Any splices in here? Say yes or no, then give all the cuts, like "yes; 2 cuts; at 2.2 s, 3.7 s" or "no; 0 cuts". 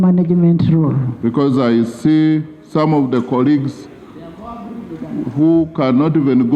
no; 0 cuts